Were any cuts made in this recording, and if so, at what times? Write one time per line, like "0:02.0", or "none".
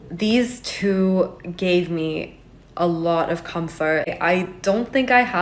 0:04.1